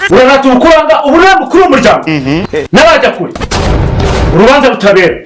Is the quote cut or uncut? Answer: uncut